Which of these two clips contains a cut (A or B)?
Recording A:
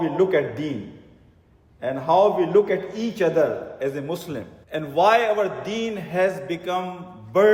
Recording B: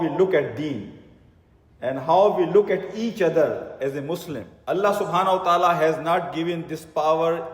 B